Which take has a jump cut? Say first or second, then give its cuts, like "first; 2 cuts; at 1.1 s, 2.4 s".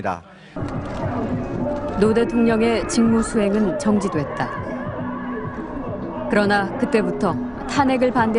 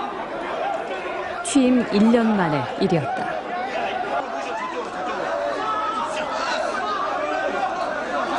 first; 1 cut; at 3.8 s